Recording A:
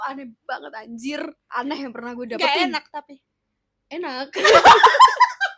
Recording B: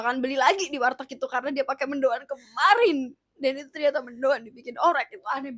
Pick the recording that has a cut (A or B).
A